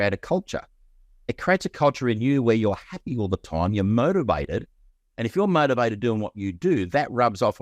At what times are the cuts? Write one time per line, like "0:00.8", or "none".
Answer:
0:01.1